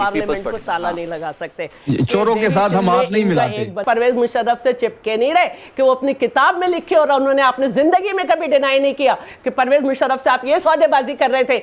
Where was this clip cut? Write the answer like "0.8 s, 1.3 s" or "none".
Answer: 3.8 s